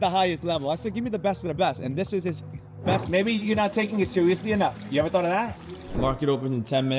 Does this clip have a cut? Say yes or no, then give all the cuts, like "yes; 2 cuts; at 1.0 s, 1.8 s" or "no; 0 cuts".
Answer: yes; 2 cuts; at 3.0 s, 5.9 s